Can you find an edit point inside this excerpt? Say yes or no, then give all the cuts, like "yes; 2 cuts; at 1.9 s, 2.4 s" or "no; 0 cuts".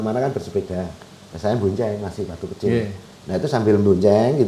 no; 0 cuts